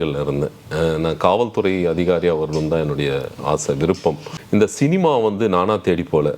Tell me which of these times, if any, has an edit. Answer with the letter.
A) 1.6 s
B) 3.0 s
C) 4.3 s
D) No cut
C